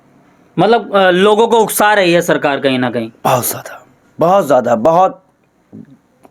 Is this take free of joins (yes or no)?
yes